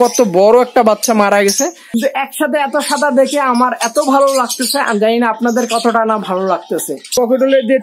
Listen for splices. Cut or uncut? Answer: cut